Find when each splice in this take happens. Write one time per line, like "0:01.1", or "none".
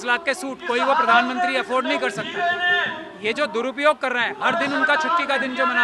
none